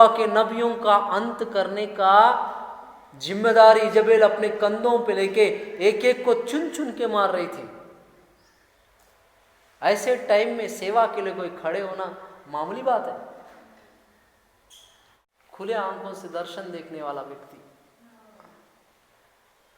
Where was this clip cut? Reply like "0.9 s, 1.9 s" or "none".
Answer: 15.2 s

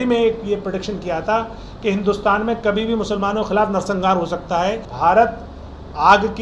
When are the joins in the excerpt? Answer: 4.9 s

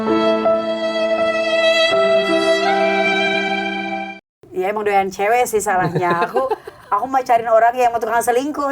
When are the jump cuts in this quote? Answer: 4.3 s

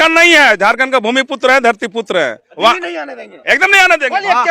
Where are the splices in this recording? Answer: 2.5 s

